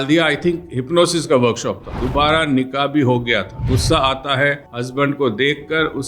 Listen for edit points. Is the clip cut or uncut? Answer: cut